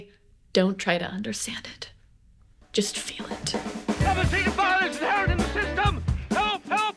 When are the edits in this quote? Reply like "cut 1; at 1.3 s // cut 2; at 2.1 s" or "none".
cut 1; at 3.3 s